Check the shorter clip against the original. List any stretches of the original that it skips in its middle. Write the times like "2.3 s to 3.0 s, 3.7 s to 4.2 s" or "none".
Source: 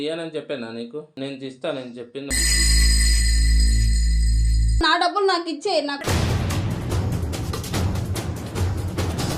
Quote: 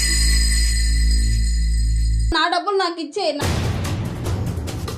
5.9 s to 6.1 s